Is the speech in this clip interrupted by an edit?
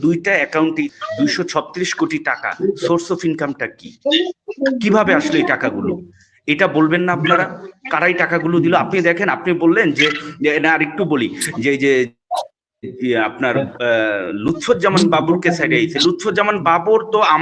yes; 1 cut; at 0.9 s

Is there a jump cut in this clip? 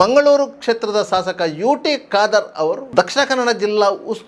yes; 1 cut; at 2.8 s

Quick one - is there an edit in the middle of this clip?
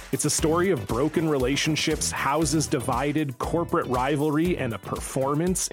no; 0 cuts

